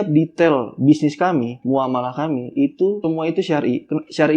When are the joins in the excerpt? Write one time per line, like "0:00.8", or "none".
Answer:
0:03.0